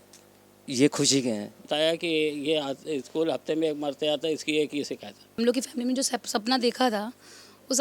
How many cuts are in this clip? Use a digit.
2